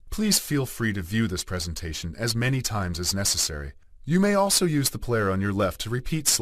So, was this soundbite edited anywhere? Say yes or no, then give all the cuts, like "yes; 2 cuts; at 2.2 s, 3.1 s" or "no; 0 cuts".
yes; 1 cut; at 4.5 s